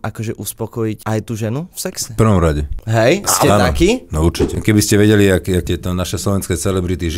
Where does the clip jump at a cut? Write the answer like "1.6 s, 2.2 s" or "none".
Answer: 1.0 s, 2.0 s, 2.7 s, 4.6 s, 5.7 s